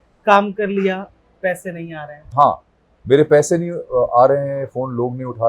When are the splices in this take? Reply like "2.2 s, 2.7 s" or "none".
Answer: 2.3 s